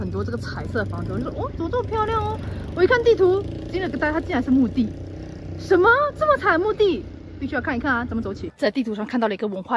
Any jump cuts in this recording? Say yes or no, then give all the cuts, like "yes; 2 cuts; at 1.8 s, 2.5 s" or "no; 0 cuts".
yes; 1 cut; at 8.5 s